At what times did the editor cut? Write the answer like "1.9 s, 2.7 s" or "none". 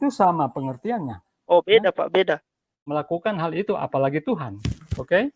2.9 s